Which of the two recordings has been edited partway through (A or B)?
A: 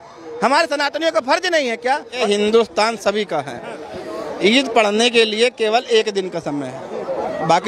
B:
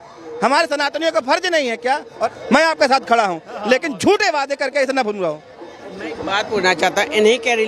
A